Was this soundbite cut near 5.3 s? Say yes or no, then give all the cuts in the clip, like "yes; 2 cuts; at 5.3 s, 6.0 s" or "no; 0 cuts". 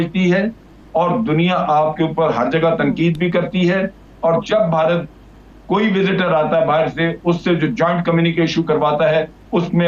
no; 0 cuts